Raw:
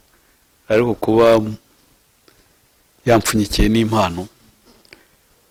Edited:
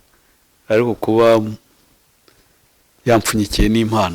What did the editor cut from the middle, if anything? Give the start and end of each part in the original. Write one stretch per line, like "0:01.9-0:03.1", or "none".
none

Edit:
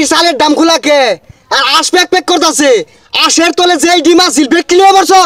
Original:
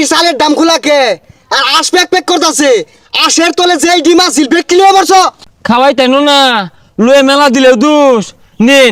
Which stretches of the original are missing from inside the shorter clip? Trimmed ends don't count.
none

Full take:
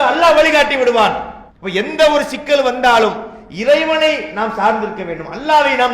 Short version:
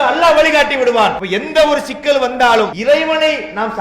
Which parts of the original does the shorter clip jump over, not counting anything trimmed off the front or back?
0:01.2-0:01.6
0:03.2-0:03.6

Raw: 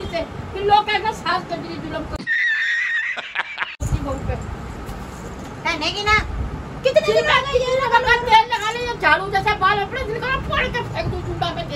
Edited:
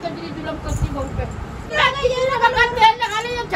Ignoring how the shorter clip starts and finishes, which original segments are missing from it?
0:02.2-0:03.8
0:04.8-0:07.2

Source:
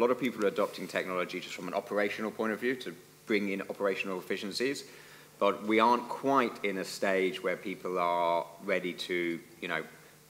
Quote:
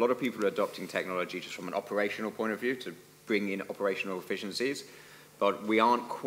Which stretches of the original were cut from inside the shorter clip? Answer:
none

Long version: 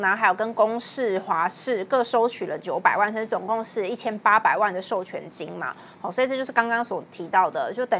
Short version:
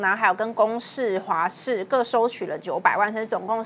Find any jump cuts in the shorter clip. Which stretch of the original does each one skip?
none

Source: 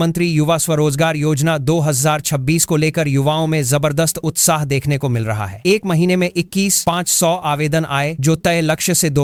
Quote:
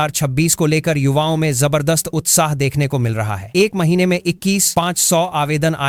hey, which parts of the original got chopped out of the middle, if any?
none

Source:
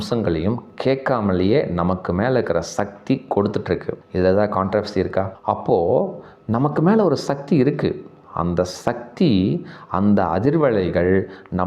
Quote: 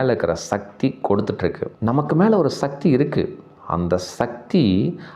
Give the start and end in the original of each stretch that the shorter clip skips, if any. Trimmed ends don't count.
0:03.9-0:06.3

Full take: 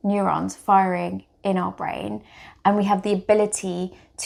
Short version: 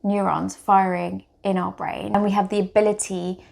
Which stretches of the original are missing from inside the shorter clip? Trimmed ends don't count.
0:02.1-0:02.7

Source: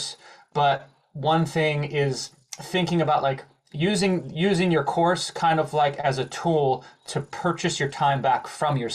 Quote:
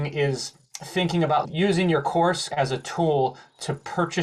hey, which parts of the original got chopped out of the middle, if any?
0:03.2-0:04.2
0:05.3-0:06.0

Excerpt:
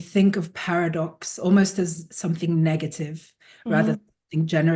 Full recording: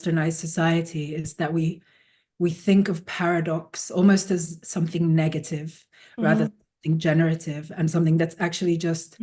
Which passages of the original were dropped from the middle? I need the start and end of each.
none

